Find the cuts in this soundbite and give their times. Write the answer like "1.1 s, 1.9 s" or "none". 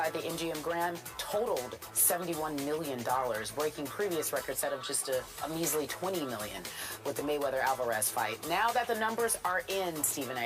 4.9 s